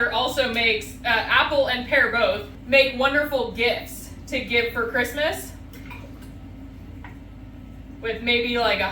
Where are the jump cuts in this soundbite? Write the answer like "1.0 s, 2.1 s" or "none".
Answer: 2.5 s